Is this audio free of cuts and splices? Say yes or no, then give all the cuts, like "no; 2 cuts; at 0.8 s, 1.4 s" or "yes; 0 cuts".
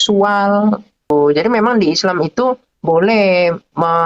no; 1 cut; at 1.1 s